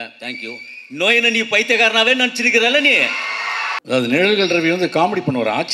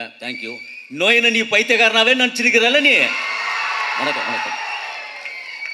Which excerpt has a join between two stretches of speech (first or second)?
first